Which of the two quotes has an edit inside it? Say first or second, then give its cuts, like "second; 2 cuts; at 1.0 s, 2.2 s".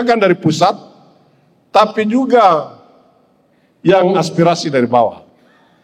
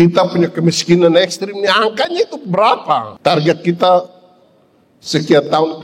second; 1 cut; at 3.1 s